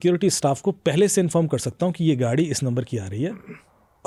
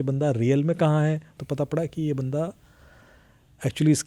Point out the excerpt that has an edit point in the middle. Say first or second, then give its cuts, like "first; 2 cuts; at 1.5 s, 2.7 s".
second; 1 cut; at 1.4 s